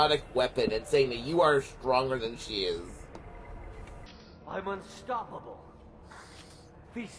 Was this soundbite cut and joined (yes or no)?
yes